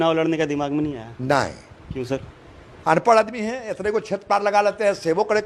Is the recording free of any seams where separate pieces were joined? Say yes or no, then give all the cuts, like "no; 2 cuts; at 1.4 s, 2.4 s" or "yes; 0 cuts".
yes; 0 cuts